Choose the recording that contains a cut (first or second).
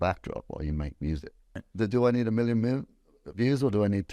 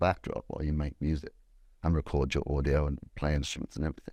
first